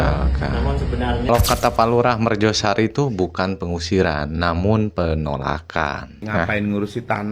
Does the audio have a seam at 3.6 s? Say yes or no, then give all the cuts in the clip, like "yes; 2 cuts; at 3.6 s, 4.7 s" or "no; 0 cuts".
no; 2 cuts; at 1.3 s, 6.2 s